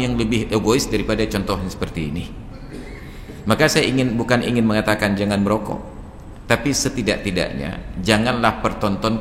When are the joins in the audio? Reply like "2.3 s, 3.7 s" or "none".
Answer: none